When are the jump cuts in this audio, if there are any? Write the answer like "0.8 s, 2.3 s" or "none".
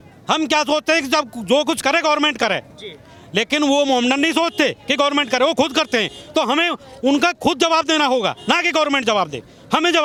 none